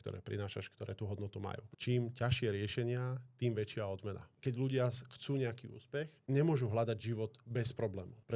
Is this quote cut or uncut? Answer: cut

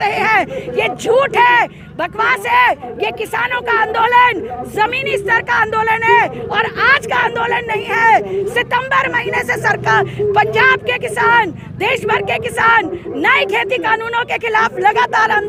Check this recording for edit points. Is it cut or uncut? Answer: uncut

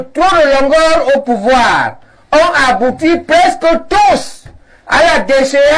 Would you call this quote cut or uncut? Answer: uncut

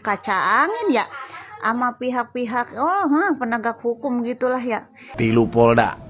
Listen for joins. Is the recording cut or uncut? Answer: cut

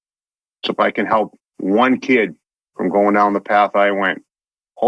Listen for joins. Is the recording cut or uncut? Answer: uncut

